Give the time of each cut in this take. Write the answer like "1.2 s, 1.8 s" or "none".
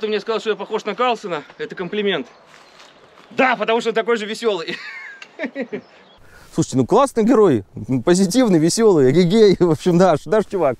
6.1 s